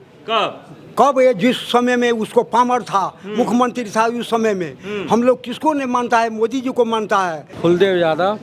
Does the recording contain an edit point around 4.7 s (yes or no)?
no